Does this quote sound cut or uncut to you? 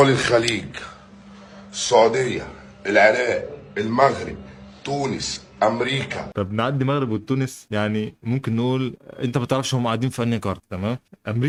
uncut